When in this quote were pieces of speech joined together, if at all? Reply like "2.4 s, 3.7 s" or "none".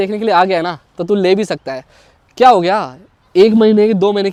none